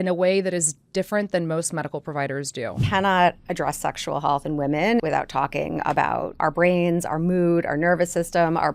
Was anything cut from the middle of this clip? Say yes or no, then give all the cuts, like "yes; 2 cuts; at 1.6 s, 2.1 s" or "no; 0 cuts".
yes; 3 cuts; at 2.8 s, 5.0 s, 6.4 s